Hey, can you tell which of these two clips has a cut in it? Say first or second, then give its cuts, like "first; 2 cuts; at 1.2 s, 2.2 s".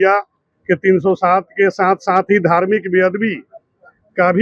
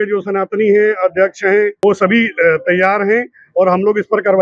second; 1 cut; at 1.7 s